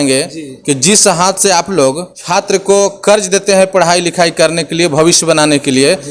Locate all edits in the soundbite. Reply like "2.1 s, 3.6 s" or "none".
2.1 s